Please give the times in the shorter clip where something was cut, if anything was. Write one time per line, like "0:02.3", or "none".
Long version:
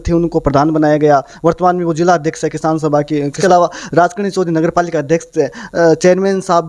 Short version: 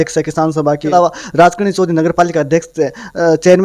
0:00.9

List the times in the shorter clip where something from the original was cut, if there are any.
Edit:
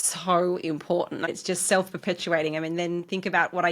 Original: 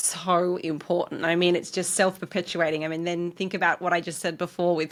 0:01.3

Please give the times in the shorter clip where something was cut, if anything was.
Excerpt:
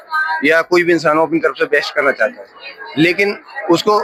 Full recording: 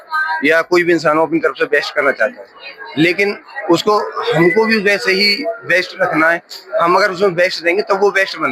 none

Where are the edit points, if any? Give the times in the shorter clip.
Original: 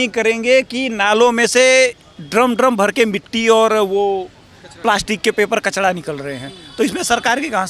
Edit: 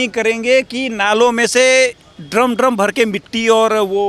none

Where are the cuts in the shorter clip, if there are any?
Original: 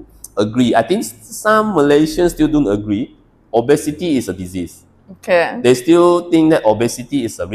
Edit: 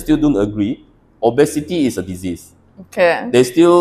none

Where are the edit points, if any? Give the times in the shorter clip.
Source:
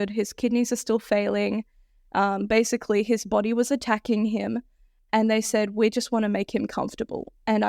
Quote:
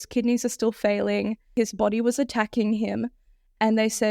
0:01.5

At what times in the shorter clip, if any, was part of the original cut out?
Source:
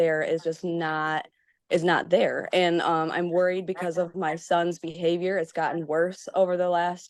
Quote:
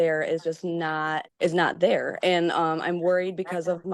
0:01.3

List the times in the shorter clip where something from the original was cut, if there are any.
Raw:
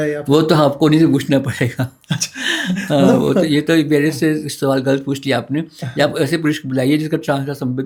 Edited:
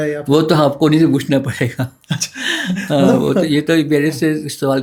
none

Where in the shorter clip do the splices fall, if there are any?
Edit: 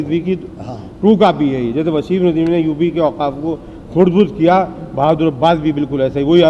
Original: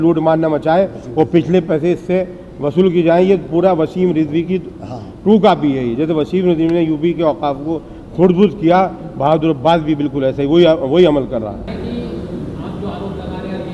none

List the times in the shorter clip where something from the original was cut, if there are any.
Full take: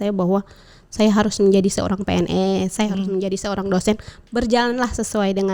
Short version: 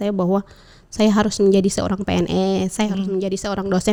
none

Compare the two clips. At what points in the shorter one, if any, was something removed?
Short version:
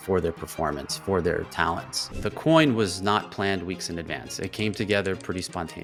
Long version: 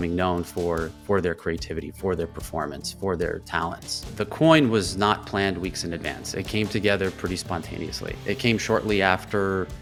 none

